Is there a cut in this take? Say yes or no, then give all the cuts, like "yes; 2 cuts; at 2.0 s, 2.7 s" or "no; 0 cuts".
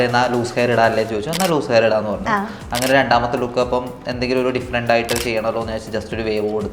no; 0 cuts